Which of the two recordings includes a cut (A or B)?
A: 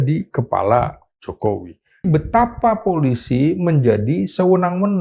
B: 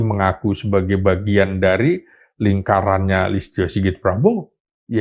A